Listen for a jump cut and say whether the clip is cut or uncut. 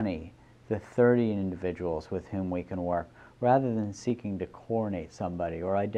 cut